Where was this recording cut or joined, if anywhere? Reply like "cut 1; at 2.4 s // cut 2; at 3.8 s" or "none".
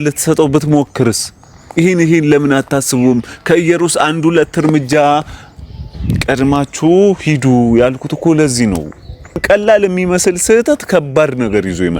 cut 1; at 9.4 s